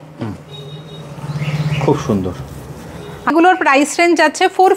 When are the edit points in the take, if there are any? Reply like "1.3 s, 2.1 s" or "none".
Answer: 3.3 s

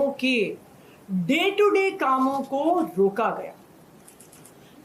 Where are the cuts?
none

